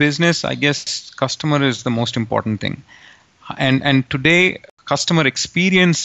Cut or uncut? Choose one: cut